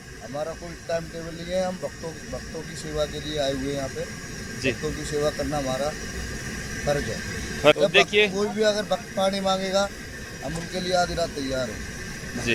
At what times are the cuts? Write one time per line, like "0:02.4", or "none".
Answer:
0:07.7

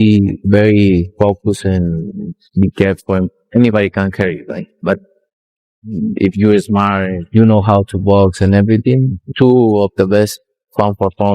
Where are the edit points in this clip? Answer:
0:09.1

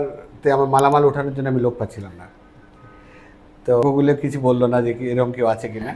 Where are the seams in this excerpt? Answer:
0:03.8

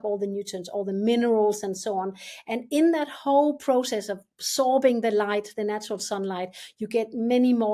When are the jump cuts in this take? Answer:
none

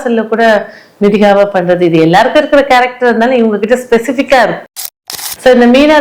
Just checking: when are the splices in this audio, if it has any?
0:04.7

